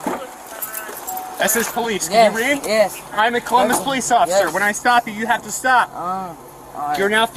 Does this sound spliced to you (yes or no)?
no